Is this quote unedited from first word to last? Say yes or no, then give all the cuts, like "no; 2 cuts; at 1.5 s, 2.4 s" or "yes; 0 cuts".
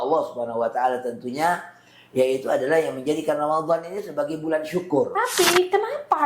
no; 1 cut; at 5.1 s